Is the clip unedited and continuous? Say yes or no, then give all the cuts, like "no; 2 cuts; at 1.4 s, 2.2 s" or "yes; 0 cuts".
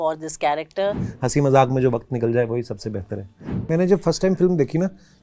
no; 2 cuts; at 1.1 s, 3.7 s